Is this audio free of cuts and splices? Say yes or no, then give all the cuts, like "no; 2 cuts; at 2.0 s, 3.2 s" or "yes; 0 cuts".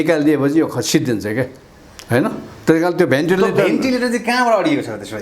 yes; 0 cuts